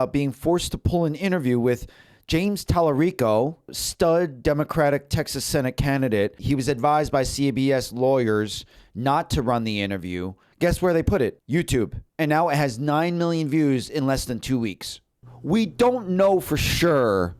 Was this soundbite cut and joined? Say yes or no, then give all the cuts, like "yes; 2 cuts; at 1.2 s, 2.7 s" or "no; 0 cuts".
no; 0 cuts